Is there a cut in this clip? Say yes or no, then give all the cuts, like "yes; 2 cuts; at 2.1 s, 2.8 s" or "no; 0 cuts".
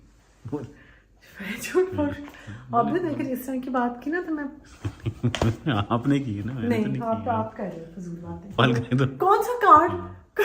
yes; 1 cut; at 8.6 s